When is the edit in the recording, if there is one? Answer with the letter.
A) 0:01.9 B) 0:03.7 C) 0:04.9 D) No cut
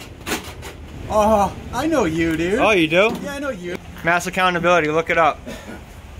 B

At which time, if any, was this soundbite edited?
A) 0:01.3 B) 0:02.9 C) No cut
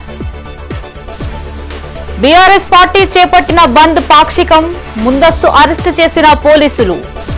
C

